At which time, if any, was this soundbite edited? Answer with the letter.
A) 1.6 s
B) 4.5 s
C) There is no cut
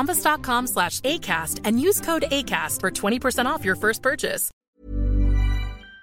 B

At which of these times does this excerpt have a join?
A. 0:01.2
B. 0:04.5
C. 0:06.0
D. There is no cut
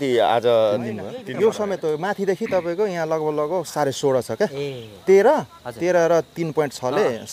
A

